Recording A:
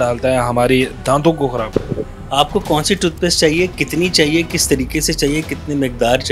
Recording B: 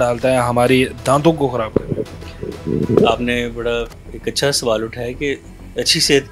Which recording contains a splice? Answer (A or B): A